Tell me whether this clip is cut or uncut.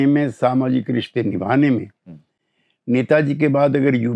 uncut